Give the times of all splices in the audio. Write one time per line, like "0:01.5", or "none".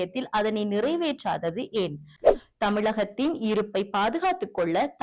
none